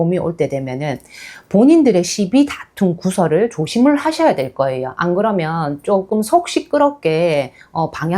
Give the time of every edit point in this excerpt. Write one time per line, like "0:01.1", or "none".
none